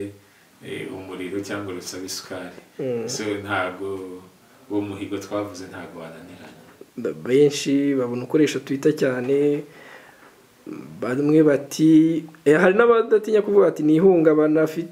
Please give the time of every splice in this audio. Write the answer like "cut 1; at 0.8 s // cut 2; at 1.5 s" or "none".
none

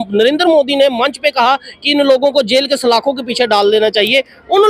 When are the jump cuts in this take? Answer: none

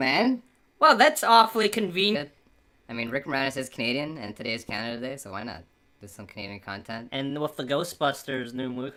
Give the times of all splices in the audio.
none

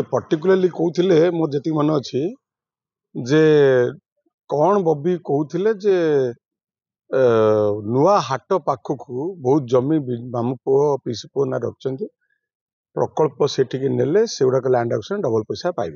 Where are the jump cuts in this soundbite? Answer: none

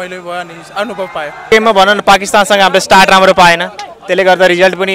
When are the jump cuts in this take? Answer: cut 1; at 1.4 s

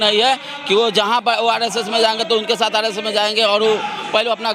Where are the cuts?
none

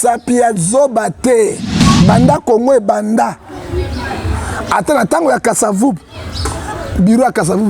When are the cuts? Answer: cut 1; at 1.7 s

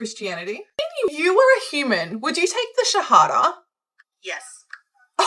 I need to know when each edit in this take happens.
cut 1; at 1.1 s

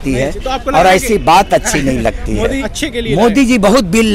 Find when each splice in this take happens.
cut 1; at 2.6 s

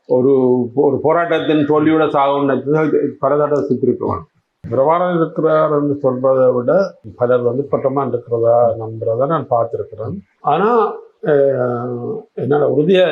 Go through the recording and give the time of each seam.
cut 1; at 4.6 s

